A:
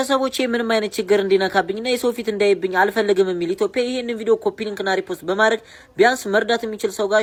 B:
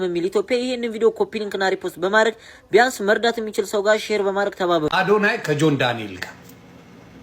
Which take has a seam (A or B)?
B